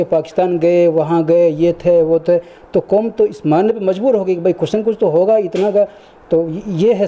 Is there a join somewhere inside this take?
no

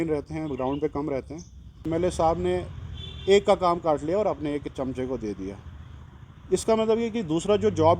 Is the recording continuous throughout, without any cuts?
no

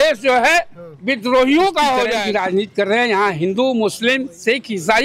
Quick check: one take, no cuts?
no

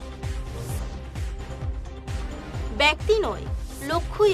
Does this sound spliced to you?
yes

